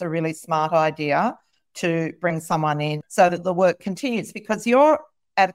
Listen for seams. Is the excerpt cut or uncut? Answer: cut